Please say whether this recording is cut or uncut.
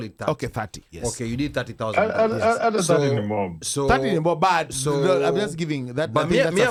uncut